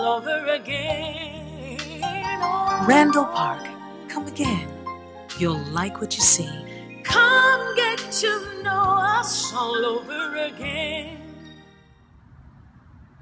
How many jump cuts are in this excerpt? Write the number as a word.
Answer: one